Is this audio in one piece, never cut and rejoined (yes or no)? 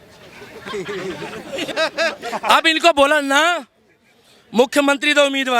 no